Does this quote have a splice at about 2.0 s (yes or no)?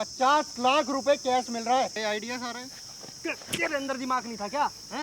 yes